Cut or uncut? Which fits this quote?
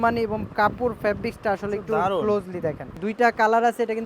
cut